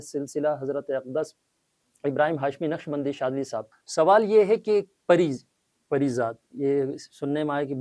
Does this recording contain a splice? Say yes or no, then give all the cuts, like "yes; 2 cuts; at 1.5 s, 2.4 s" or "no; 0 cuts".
yes; 1 cut; at 3.7 s